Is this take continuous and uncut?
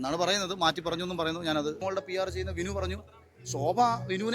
no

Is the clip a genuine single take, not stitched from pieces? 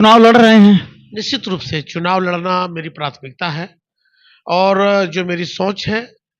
yes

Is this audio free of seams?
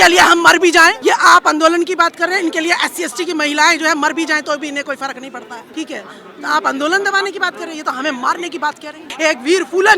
no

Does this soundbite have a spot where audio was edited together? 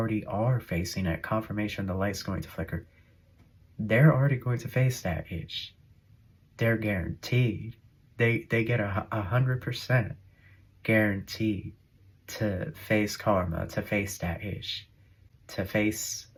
no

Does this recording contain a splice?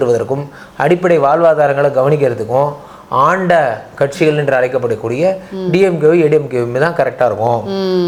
no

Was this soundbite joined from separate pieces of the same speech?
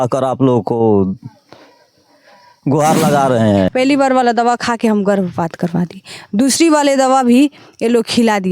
yes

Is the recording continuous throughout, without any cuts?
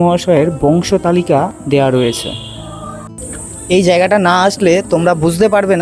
no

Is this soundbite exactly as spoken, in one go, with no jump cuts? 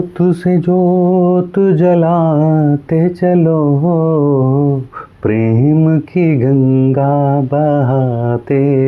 yes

